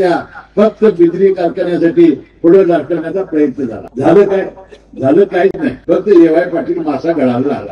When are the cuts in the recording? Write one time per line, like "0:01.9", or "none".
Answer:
0:03.8
0:05.7